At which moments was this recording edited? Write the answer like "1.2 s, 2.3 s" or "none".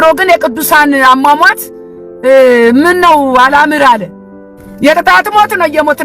none